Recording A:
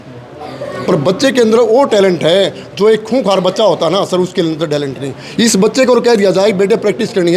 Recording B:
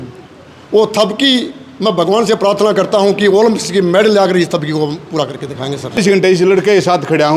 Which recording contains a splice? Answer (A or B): B